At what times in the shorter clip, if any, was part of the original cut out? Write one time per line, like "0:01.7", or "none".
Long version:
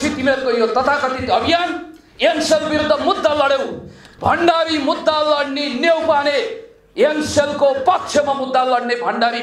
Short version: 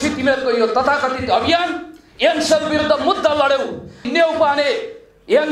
0:04.0

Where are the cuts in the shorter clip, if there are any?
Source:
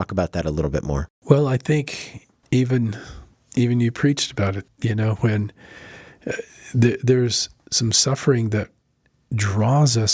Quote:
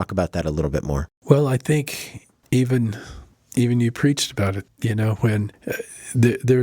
0:05.5

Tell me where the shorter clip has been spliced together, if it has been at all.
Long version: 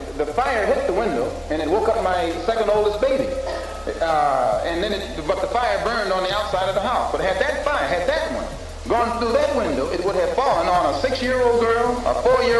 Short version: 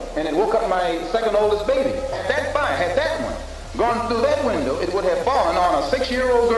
0:02.2

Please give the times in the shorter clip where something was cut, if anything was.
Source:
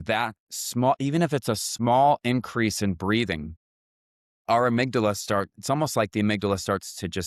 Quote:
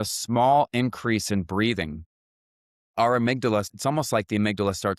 0:03.7

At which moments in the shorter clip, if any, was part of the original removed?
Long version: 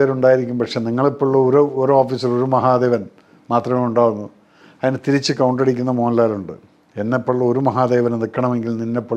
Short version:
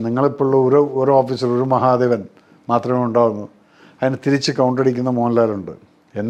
none

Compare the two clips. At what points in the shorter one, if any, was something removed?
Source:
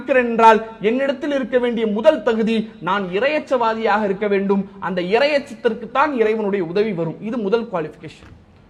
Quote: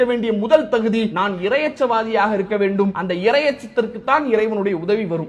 0:01.1
0:03.0

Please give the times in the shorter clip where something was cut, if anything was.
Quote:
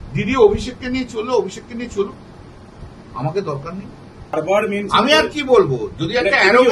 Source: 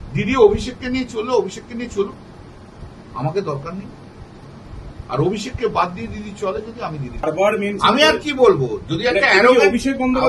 0:04.2

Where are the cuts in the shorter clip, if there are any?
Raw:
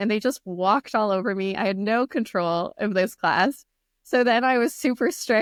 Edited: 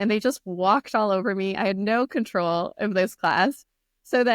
none

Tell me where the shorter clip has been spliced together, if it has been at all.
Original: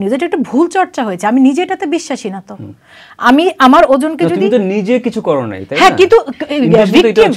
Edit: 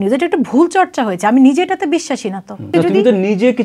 0:02.7

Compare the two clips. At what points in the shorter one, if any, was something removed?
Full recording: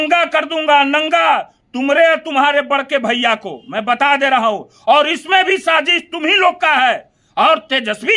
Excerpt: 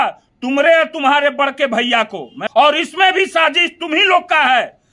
0:02.4

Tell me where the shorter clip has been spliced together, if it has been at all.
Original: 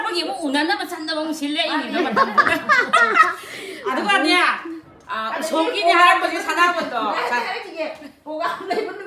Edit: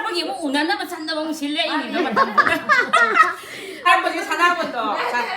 0:03.9

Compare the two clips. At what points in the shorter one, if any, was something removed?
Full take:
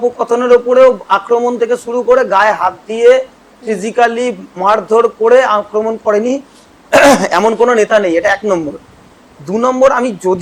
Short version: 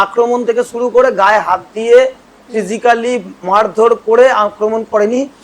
none

